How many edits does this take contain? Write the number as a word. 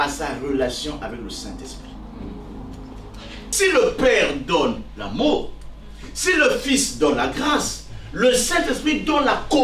one